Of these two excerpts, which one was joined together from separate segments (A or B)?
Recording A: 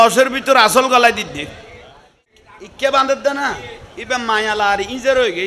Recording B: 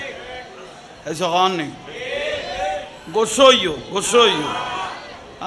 A